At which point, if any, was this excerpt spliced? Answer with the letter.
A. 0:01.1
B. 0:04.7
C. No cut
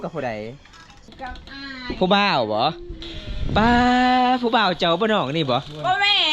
A